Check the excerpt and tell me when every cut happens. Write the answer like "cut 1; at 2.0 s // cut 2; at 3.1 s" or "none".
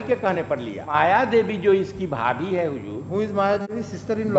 cut 1; at 0.9 s // cut 2; at 3.0 s